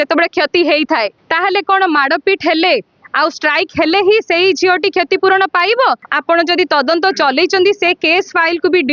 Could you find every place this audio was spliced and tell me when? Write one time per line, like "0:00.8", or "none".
0:01.2
0:06.1